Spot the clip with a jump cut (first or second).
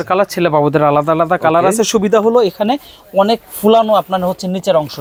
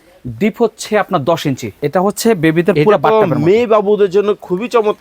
second